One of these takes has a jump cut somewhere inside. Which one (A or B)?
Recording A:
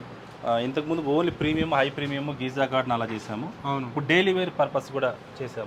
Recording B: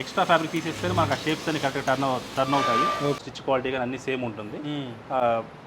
B